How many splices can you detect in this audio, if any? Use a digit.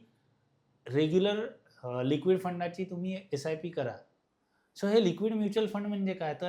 1